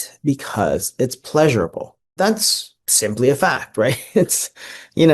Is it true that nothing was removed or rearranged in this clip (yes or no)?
no